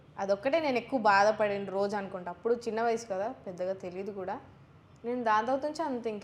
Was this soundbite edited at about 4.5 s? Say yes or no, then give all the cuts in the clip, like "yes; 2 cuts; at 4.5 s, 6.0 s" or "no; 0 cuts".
no; 0 cuts